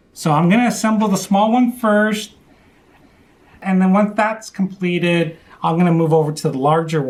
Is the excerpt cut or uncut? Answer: uncut